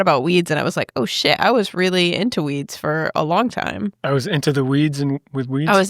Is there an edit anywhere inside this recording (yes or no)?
yes